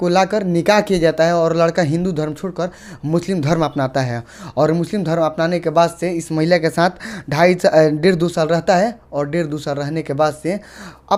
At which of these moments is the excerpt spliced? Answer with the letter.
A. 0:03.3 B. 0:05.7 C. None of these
C